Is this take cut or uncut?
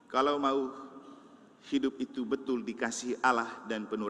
uncut